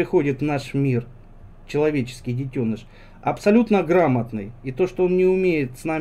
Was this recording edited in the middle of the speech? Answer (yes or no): no